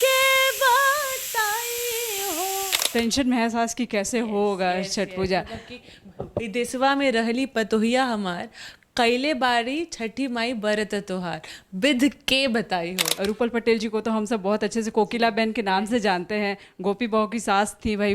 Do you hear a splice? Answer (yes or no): yes